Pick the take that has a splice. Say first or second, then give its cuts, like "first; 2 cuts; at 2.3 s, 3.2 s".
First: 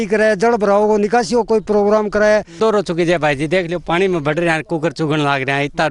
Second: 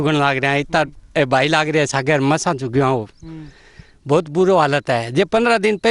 first; 1 cut; at 2.6 s